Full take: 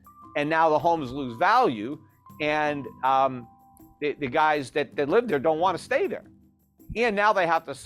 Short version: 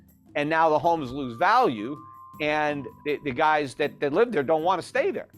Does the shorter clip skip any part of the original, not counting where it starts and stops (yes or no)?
yes